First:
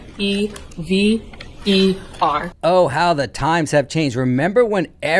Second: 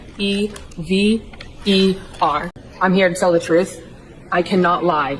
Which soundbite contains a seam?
second; 1 cut; at 2.5 s

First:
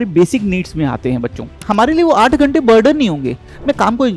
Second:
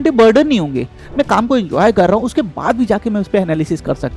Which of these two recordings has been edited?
first; 1 cut; at 1.6 s

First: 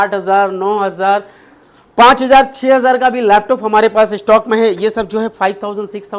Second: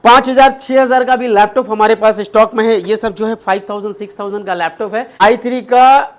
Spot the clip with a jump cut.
second; 1 cut; at 5.2 s

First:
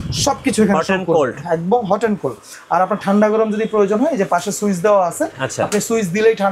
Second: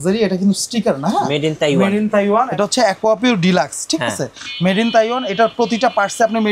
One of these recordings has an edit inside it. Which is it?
second; 1 cut; at 2.5 s

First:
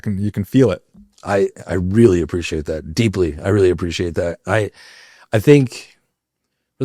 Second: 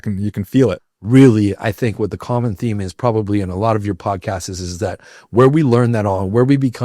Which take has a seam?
second; 1 cut; at 0.9 s

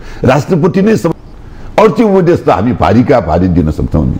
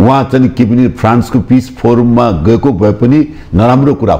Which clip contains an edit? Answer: first; 1 cut; at 1.1 s

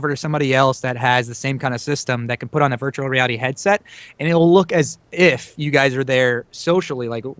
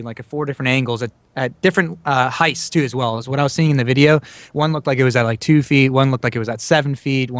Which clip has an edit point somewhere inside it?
first; 1 cut; at 6.5 s

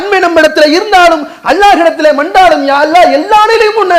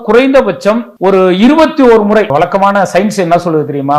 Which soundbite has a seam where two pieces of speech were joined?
second; 2 cuts; at 0.9 s, 2.3 s

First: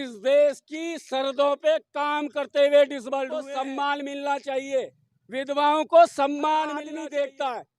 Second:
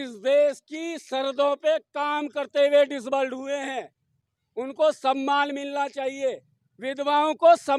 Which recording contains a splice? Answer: first; 2 cuts; at 3.5 s, 6.8 s

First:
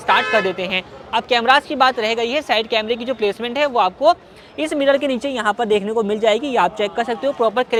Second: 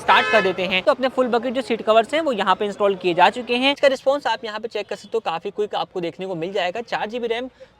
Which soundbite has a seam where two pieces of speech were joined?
second; 2 cuts; at 0.8 s, 3.8 s

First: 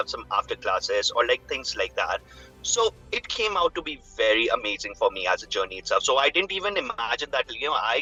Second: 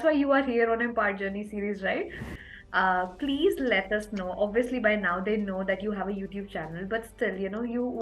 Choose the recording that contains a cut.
second; 1 cut; at 2.2 s

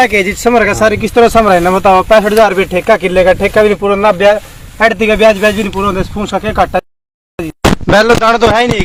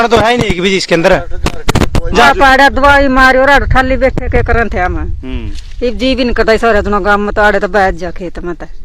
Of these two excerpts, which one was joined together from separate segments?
second; 1 cut; at 2.3 s

